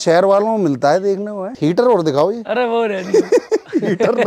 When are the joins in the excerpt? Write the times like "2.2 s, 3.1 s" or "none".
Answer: 1.5 s

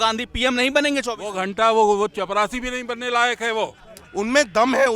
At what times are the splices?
4.0 s

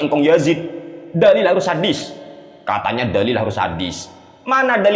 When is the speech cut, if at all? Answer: none

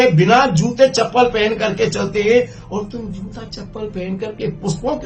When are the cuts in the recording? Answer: none

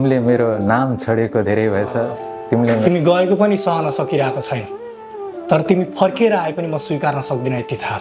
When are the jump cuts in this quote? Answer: 2.8 s

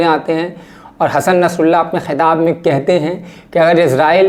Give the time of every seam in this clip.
none

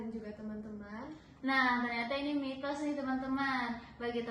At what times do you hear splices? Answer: none

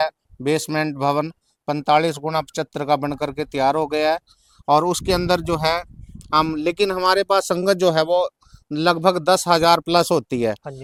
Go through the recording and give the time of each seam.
none

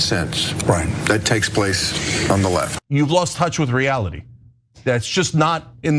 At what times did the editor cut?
2.7 s

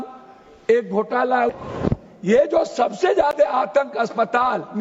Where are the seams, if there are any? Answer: 1.6 s

